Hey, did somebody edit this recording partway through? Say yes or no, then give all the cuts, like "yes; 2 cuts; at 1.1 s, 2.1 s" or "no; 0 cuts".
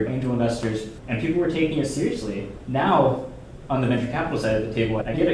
yes; 2 cuts; at 1.0 s, 2.6 s